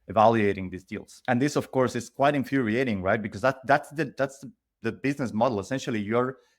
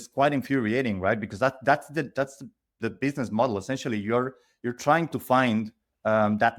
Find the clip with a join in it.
first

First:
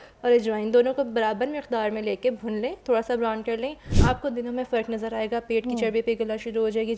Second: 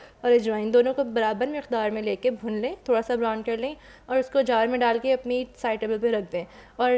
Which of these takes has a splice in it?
first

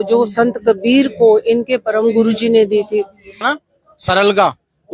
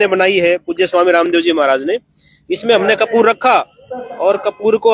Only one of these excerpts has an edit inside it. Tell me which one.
first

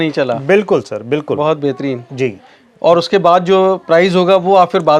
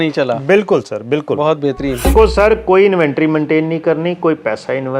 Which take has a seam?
second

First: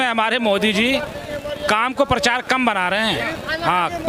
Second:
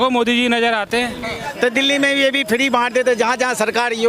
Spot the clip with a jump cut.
second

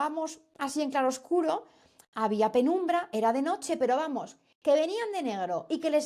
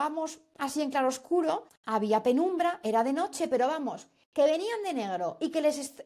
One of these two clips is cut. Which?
second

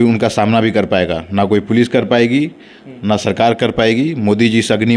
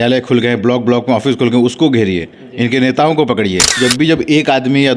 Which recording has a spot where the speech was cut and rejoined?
second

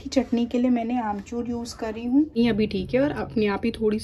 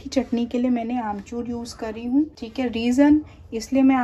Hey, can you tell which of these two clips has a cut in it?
first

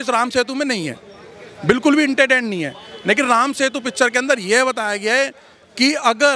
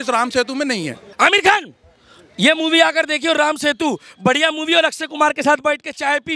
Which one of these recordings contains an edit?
second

